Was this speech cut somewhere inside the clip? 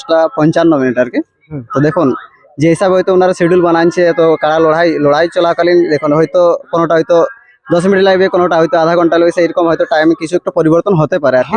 no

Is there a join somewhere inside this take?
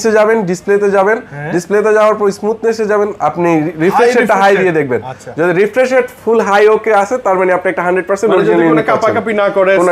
no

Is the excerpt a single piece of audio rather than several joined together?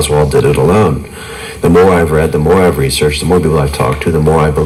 yes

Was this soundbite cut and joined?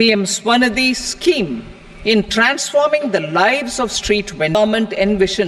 yes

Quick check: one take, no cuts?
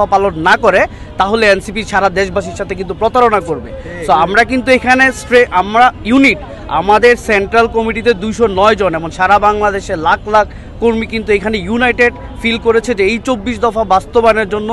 yes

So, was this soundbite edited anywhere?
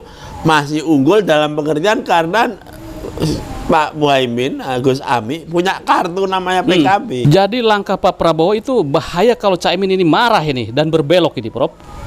yes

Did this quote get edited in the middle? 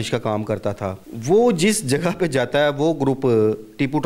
yes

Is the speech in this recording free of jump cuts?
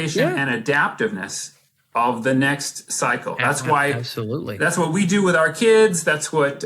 yes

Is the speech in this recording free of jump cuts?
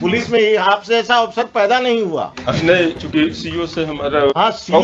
yes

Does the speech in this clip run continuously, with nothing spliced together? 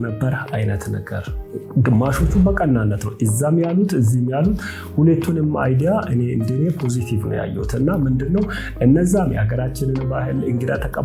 yes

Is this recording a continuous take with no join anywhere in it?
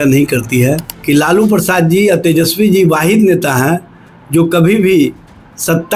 no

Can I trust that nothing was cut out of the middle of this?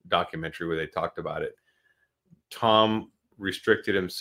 yes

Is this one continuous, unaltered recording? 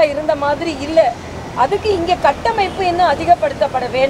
yes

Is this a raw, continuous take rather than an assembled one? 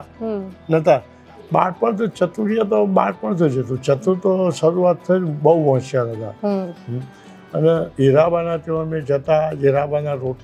no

